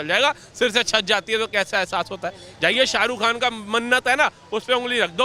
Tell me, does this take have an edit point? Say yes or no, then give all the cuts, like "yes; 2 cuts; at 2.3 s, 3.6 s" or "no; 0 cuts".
no; 0 cuts